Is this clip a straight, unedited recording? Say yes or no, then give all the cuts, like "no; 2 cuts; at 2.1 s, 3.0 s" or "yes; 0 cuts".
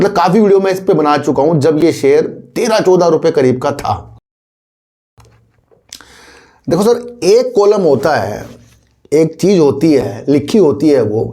yes; 0 cuts